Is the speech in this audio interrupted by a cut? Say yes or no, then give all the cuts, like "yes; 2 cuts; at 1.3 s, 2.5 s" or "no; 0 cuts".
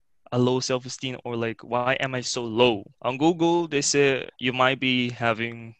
yes; 2 cuts; at 2.9 s, 4.3 s